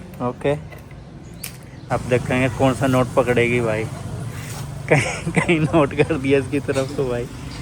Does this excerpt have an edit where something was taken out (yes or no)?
yes